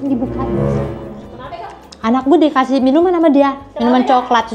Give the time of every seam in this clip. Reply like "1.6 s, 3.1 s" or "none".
1.6 s